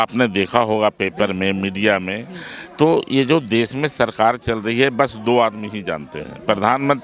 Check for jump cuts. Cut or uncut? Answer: uncut